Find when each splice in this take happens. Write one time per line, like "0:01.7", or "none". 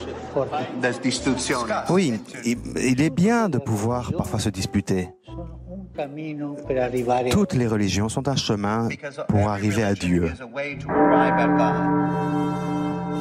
none